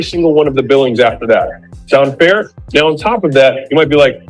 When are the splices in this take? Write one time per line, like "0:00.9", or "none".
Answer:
0:02.5